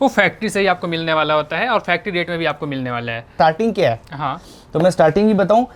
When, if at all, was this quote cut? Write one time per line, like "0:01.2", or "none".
0:03.3